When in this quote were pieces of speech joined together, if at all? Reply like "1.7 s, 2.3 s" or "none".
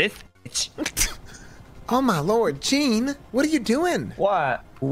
1.5 s